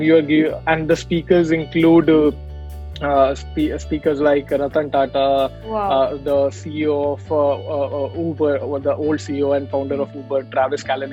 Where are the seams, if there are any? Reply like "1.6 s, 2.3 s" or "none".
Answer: none